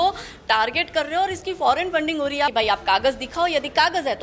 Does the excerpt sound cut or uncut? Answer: cut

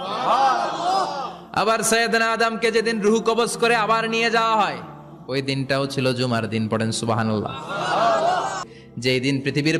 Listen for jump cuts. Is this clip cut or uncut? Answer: cut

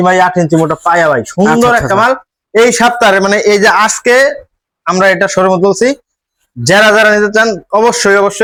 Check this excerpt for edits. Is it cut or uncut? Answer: uncut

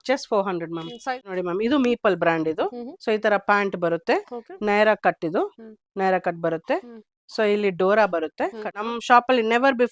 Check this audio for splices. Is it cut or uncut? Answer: cut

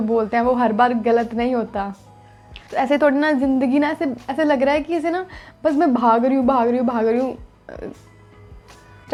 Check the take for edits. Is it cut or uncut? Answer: uncut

